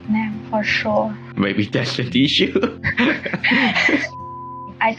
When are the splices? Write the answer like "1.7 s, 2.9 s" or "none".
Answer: 1.3 s, 2.8 s, 4.2 s